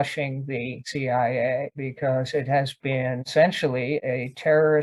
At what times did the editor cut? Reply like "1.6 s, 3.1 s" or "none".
none